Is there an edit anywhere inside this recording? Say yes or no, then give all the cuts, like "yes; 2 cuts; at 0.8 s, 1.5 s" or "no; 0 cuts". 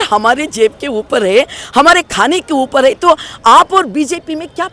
no; 0 cuts